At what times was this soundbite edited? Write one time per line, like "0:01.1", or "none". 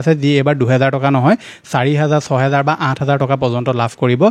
none